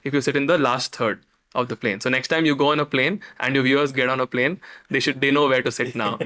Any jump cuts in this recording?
no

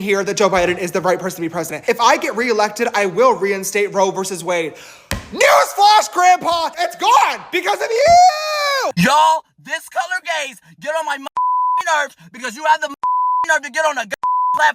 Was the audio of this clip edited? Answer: yes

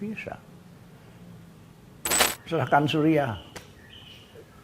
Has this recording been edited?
yes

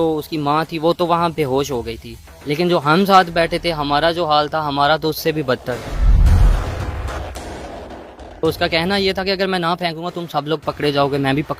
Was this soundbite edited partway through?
no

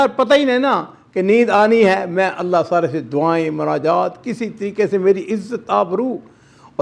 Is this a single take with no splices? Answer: yes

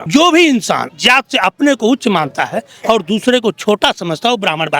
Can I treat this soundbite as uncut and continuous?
no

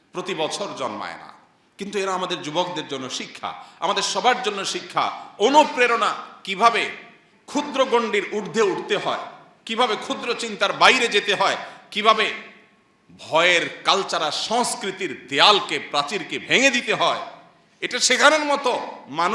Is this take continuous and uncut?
yes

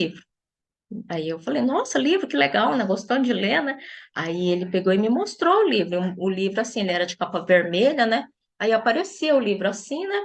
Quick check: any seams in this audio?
no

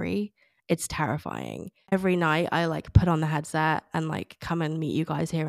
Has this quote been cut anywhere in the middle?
yes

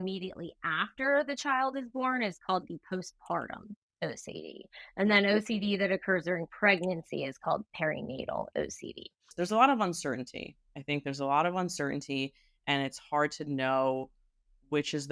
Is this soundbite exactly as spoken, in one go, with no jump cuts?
no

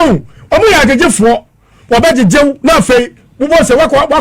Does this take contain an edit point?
yes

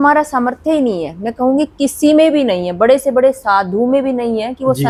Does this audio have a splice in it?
no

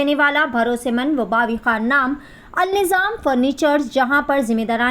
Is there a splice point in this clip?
no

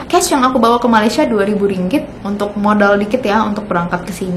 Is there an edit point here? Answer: yes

